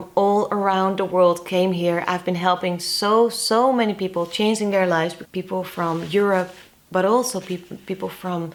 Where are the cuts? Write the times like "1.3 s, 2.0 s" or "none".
none